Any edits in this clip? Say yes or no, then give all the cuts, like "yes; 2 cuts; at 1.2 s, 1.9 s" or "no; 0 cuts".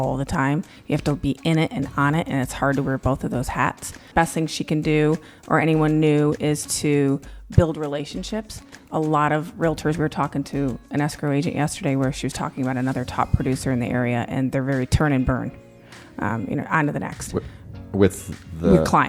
yes; 1 cut; at 4.0 s